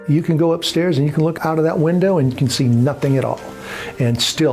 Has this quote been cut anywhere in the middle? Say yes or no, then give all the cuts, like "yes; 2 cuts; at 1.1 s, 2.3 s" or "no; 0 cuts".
yes; 1 cut; at 1.3 s